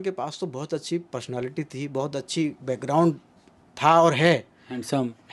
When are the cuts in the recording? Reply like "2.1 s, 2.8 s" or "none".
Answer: none